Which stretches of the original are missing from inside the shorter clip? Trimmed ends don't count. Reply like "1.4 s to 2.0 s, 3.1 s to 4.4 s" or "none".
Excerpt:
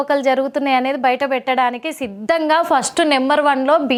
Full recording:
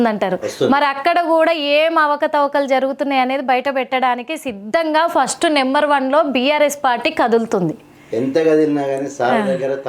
none